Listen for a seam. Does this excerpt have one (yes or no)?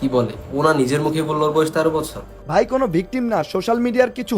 yes